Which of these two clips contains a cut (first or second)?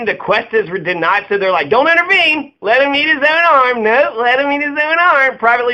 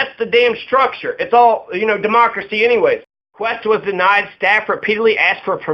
second